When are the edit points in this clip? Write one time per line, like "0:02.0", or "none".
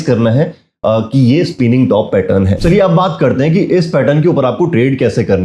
0:02.5

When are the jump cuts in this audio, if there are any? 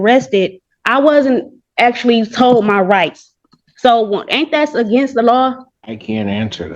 0:05.7

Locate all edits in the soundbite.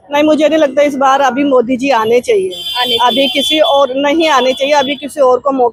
none

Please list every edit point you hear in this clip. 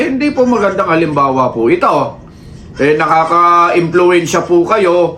none

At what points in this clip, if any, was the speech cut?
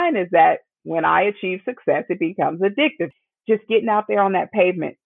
0:03.1

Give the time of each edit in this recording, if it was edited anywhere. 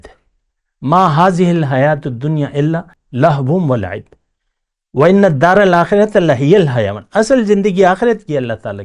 0:03.0

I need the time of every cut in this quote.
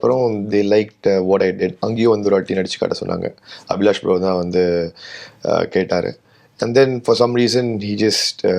none

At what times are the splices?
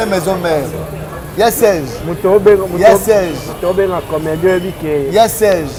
none

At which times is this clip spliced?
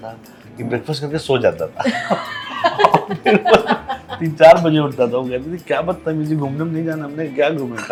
none

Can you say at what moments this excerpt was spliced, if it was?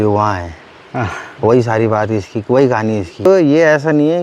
0:03.3

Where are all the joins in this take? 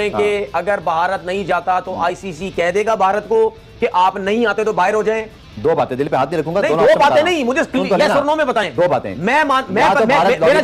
none

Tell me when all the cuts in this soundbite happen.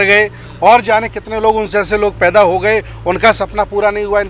none

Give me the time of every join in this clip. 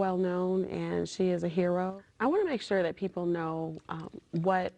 0:01.9

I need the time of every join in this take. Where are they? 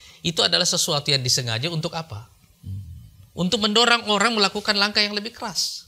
none

